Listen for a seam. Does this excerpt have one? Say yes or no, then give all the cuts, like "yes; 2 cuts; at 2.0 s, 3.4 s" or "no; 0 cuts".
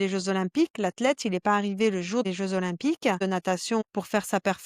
yes; 2 cuts; at 2.2 s, 3.6 s